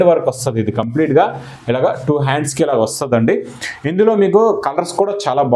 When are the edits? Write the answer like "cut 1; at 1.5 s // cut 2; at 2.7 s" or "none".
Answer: none